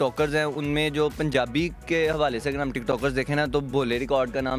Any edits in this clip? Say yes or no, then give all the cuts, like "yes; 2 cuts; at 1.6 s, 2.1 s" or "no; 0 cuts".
no; 0 cuts